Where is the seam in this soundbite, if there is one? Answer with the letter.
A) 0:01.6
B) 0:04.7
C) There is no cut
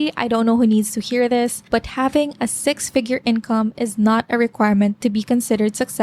A